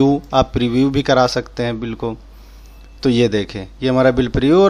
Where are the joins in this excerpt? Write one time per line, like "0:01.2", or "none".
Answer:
none